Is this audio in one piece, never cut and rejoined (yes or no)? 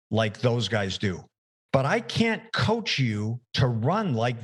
yes